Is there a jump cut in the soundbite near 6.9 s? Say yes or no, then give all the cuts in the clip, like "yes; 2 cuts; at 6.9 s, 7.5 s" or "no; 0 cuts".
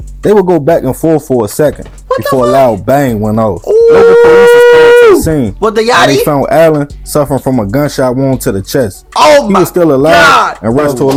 no; 0 cuts